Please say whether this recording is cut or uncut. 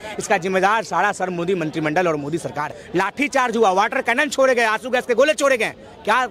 cut